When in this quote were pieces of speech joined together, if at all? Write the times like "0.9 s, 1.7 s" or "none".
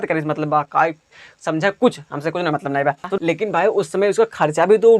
3.1 s

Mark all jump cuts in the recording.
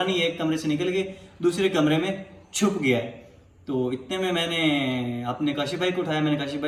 none

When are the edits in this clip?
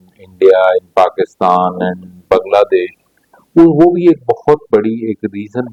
none

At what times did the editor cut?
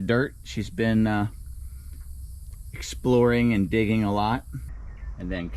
4.6 s

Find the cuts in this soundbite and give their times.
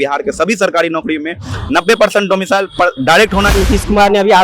3.5 s

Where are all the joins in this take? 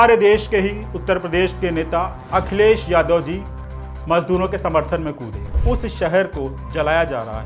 5.6 s

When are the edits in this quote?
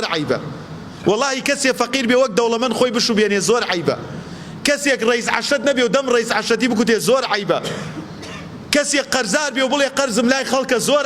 none

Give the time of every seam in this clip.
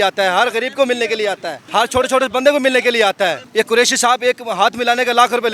1.5 s, 3.4 s

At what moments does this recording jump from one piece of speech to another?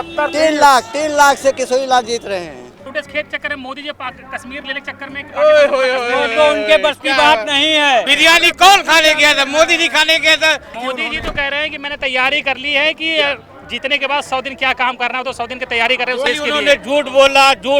2.7 s, 8.1 s, 10.7 s, 16.3 s

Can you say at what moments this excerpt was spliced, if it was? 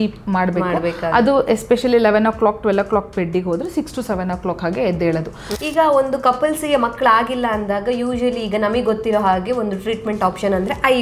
5.4 s

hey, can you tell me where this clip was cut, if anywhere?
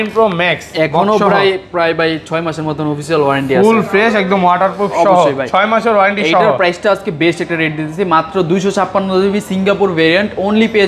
none

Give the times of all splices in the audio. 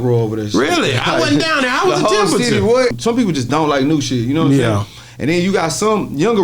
3.0 s

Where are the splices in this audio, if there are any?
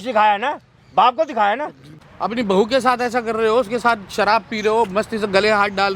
1.9 s

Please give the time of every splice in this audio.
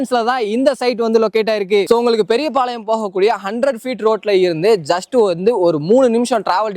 none

